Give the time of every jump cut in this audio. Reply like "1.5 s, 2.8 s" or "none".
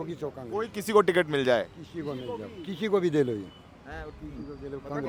none